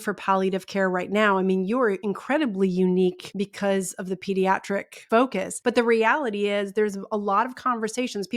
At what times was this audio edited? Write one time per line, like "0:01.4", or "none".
0:02.1
0:03.2
0:05.3